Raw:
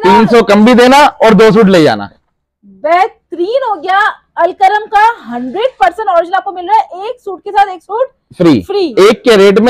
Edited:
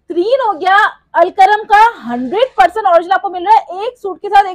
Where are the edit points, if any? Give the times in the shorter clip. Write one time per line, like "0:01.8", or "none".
none